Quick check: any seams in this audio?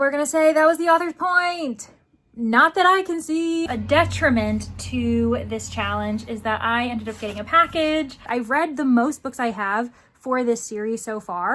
yes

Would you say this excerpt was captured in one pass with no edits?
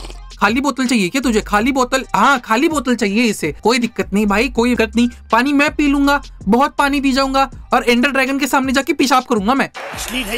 yes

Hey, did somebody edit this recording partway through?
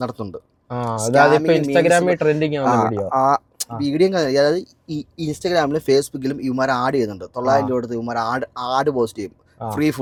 no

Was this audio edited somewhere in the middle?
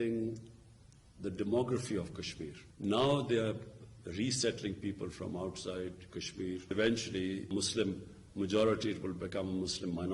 no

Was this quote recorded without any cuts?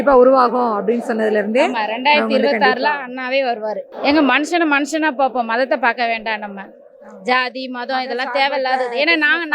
no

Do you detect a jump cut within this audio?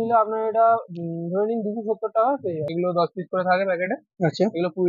yes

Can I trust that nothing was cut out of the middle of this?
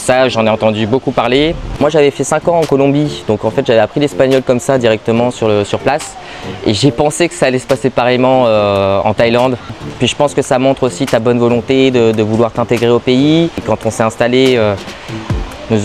no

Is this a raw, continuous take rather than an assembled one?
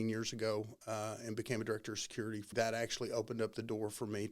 no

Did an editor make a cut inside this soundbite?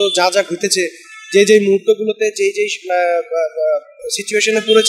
no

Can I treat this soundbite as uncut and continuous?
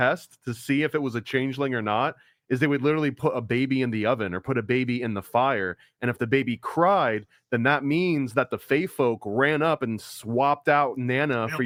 yes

